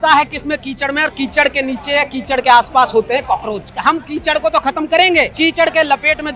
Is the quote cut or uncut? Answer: cut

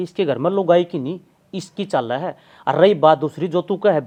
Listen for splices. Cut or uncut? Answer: uncut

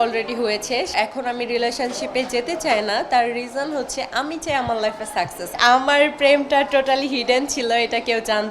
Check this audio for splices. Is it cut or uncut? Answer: cut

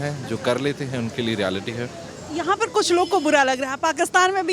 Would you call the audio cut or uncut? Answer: uncut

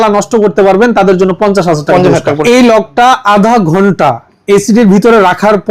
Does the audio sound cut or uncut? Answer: cut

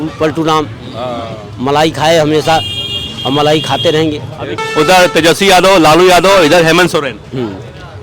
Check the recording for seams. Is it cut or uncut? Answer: cut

